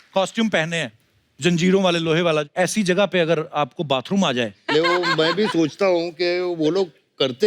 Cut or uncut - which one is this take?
cut